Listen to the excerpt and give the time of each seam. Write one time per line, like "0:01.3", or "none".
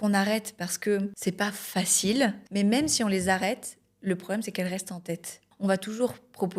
0:01.1
0:02.4
0:05.4